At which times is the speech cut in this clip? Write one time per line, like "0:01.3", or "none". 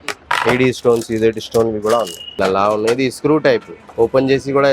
0:02.3
0:03.8